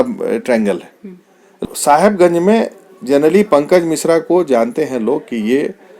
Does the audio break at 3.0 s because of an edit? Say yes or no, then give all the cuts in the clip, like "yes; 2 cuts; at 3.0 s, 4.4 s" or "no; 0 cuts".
no; 1 cut; at 1.6 s